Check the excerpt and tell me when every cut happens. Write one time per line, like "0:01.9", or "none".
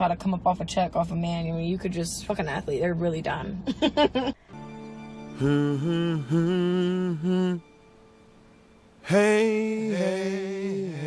0:04.5

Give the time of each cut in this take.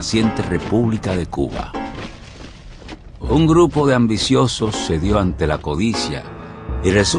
none

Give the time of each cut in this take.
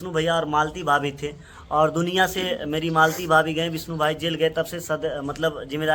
none

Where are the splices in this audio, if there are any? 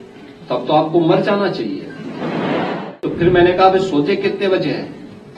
0:03.0

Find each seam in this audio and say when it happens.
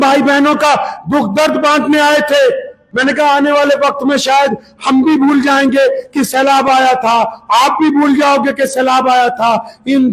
0:02.8

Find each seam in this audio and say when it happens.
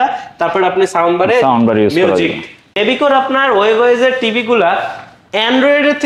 0:02.8

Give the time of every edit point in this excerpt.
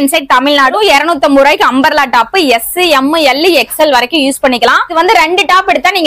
0:00.7
0:04.9

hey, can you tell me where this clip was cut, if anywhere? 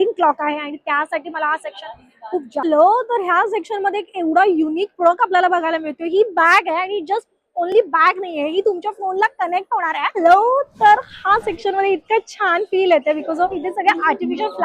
0:02.6
0:10.1

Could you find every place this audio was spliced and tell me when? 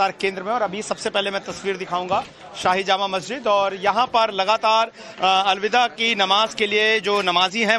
0:06.0

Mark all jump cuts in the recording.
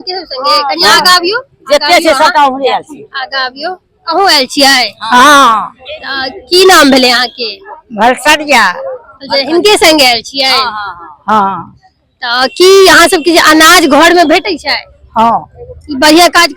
none

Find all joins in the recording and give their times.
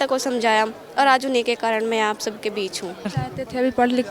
0:03.1

